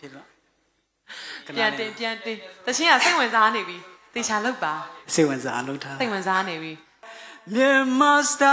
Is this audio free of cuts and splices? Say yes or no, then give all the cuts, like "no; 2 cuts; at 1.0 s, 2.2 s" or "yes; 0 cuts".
no; 1 cut; at 7.1 s